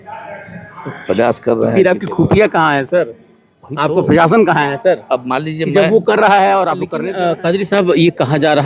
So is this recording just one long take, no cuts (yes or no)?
no